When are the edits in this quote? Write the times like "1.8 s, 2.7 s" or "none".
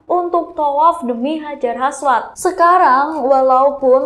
2.3 s